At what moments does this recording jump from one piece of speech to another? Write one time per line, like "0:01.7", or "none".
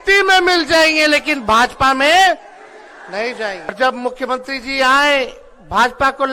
0:03.7